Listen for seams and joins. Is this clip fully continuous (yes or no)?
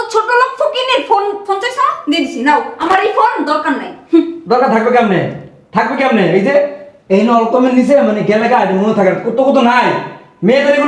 yes